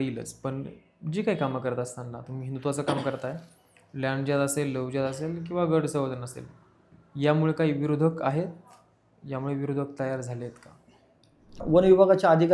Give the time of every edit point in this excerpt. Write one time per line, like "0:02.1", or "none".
0:11.6